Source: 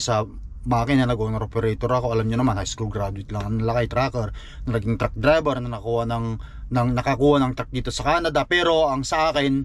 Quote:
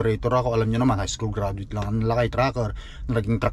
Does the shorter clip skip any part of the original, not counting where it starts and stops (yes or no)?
no